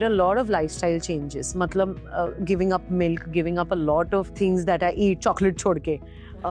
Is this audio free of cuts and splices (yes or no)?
yes